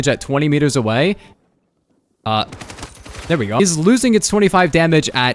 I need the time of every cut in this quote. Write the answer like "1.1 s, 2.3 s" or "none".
none